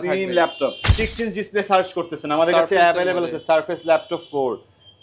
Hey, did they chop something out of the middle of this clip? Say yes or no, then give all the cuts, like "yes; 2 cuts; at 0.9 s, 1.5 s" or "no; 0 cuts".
yes; 1 cut; at 0.9 s